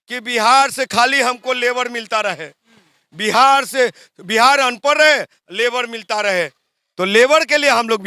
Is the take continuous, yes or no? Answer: yes